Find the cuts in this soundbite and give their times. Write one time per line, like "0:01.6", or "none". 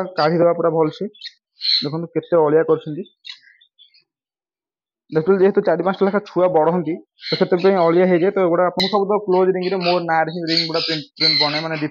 0:08.8